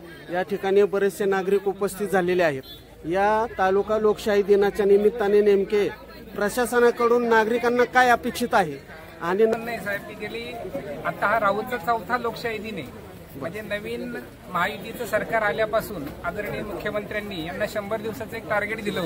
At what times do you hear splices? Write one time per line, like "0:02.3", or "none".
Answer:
0:09.5